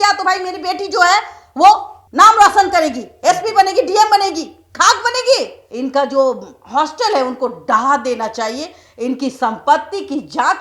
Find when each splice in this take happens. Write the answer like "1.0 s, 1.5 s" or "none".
5.6 s